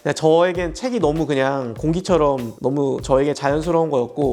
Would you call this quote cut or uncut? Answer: cut